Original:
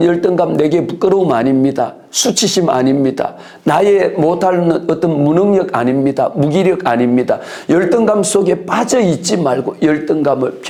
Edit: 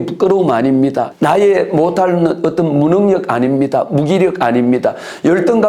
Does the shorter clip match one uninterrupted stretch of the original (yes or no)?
no